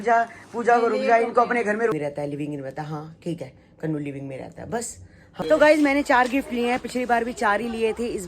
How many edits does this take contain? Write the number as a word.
two